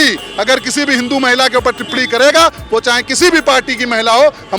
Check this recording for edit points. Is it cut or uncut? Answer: uncut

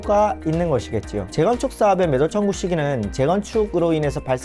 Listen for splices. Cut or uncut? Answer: cut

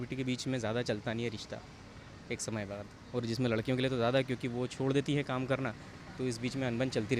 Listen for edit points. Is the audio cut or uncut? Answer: uncut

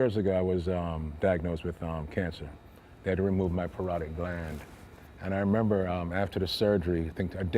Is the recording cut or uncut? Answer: cut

